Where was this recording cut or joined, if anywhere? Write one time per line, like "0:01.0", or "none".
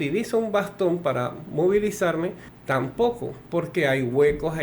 0:02.5

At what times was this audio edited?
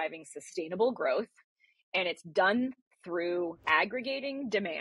0:03.6

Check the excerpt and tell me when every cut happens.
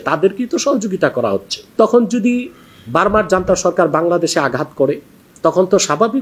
0:01.6

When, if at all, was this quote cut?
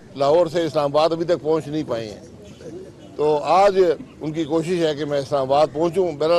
none

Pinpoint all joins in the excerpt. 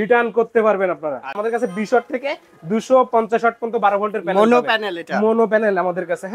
0:01.3

